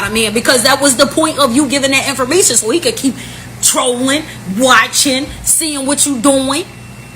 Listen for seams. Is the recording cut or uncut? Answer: cut